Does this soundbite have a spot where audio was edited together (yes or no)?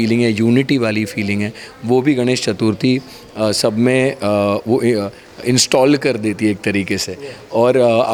no